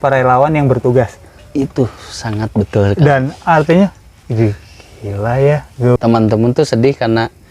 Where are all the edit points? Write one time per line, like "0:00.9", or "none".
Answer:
0:05.9

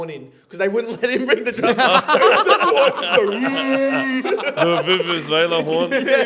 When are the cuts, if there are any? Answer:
none

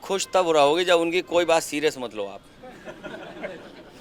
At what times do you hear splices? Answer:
none

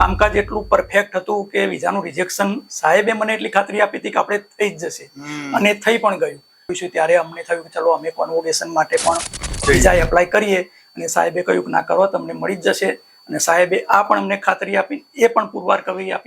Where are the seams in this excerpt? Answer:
0:06.8

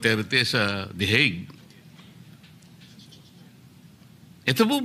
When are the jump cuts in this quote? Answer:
none

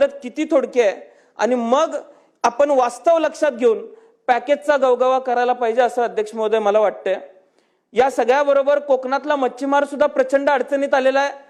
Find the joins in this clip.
none

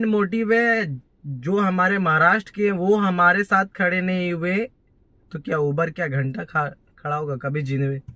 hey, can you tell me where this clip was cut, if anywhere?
none

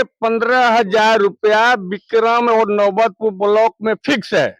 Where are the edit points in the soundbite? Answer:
none

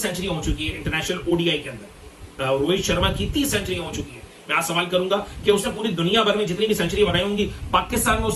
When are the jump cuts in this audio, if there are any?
none

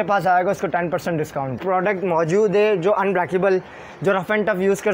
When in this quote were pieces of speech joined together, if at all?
0:01.6

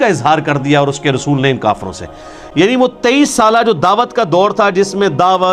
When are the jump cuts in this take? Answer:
none

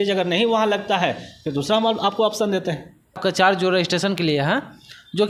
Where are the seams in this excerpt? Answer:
0:03.2

